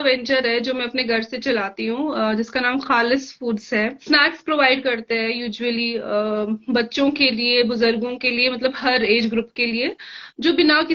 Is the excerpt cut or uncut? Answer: cut